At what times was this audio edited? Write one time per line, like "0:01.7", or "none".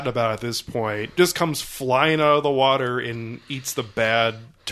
none